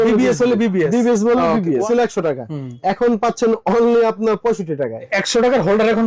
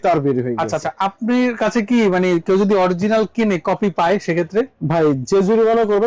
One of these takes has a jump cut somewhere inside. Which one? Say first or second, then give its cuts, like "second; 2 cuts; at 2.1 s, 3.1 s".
first; 2 cuts; at 1.8 s, 5.1 s